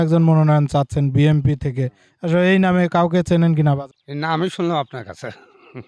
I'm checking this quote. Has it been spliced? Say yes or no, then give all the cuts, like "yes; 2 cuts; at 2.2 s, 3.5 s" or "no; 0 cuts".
yes; 1 cut; at 4.0 s